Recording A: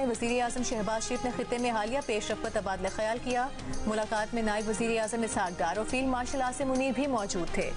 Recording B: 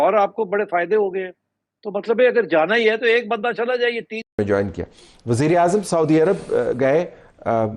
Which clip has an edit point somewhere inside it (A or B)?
B